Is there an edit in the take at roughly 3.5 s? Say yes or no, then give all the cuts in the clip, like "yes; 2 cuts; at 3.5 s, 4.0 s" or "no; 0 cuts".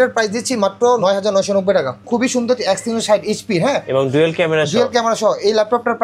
no; 2 cuts; at 1.0 s, 2.0 s